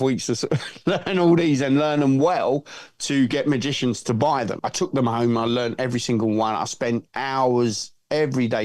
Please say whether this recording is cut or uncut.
cut